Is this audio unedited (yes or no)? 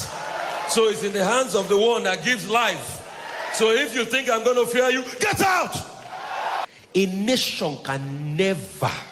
no